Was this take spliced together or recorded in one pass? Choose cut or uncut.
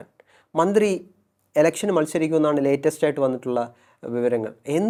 uncut